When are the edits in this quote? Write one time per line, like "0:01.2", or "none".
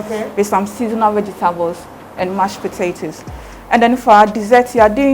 none